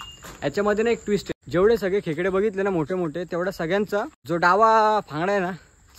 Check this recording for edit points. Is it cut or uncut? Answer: cut